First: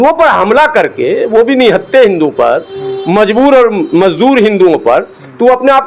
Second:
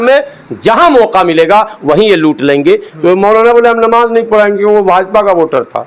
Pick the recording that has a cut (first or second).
second